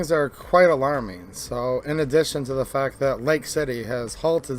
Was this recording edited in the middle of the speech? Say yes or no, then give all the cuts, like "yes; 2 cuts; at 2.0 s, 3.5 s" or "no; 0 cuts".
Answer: no; 0 cuts